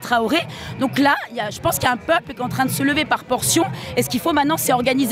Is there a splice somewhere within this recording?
no; 0 cuts

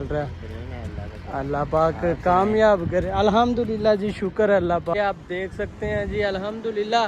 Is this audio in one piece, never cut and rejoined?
no; 1 cut; at 4.9 s

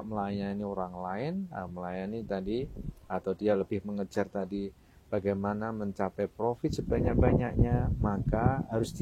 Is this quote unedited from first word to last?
yes; 0 cuts

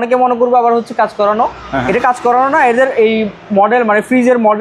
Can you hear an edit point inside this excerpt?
no; 0 cuts

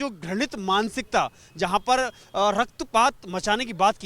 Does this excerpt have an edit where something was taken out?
no; 0 cuts

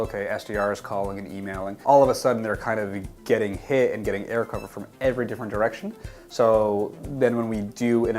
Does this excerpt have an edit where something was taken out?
yes; 1 cut; at 1.7 s

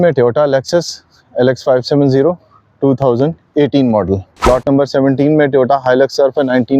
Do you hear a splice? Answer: yes; 1 cut; at 4.5 s

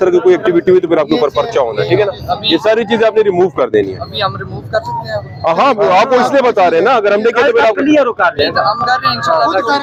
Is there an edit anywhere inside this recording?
no; 0 cuts

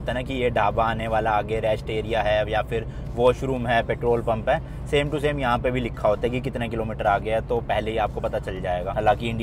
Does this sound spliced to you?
no; 0 cuts

